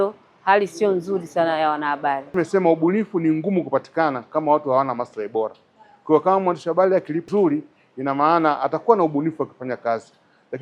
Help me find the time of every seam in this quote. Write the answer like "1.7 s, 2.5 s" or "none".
2.2 s, 7.2 s